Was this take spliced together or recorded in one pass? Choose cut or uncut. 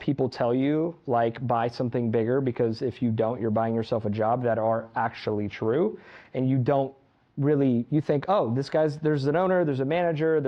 uncut